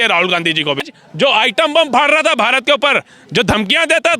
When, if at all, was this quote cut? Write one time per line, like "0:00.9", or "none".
0:01.0